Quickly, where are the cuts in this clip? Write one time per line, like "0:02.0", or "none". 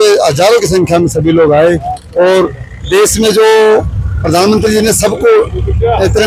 none